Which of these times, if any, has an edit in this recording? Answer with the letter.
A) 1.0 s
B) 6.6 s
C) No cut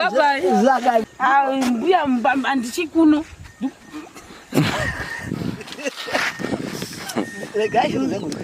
A